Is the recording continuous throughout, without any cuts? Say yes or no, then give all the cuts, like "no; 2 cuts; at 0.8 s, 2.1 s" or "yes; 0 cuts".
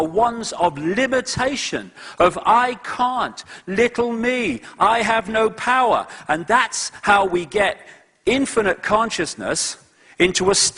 yes; 0 cuts